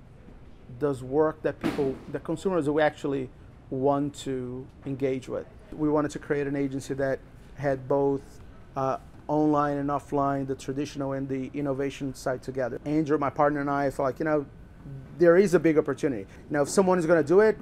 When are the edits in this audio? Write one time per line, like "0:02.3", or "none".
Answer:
0:05.7
0:12.8
0:16.3